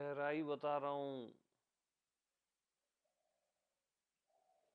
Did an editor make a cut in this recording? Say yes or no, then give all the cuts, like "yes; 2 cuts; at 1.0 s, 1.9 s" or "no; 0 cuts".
no; 0 cuts